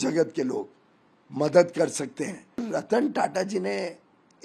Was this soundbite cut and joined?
yes; 1 cut; at 2.6 s

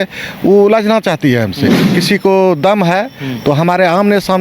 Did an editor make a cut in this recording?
yes; 1 cut; at 1.9 s

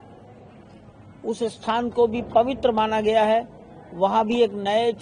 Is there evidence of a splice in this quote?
no; 0 cuts

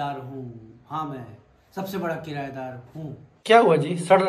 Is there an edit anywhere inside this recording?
no; 0 cuts

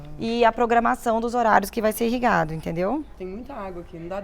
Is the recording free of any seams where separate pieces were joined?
no; 1 cut; at 3.2 s

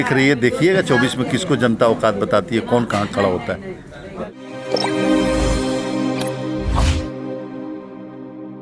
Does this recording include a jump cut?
yes; 1 cut; at 4.3 s

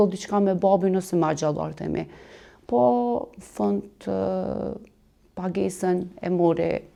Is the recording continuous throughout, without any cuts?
yes; 0 cuts

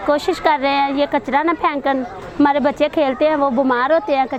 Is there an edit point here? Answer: no; 0 cuts

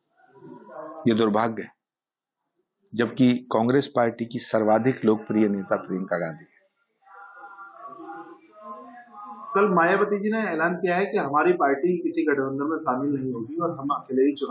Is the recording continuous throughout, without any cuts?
yes; 0 cuts

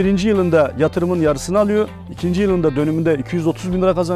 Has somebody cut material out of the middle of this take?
no; 0 cuts

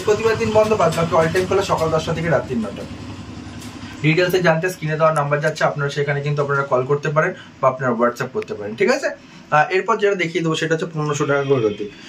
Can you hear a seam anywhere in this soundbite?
no; 0 cuts

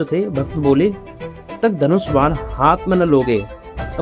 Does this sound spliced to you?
yes; 1 cut; at 1.5 s

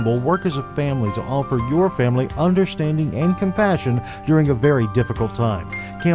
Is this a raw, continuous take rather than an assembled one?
yes; 0 cuts

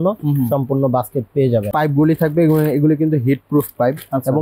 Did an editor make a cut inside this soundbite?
yes; 1 cut; at 1.7 s

